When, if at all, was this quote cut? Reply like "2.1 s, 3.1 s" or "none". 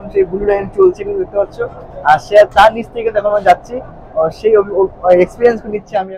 none